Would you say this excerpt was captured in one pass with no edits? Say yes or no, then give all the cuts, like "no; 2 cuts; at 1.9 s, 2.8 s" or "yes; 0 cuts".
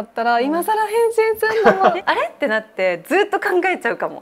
no; 1 cut; at 2.0 s